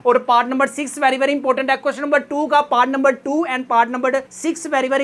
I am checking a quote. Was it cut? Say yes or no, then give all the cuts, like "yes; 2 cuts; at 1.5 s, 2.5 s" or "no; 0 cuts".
no; 0 cuts